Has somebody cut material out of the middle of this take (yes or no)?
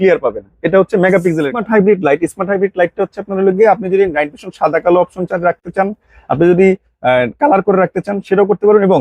yes